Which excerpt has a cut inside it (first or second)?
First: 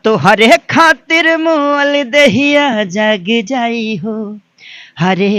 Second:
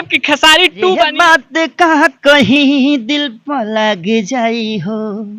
second